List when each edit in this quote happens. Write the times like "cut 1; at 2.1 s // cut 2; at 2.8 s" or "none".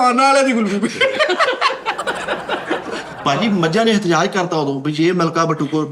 cut 1; at 3.1 s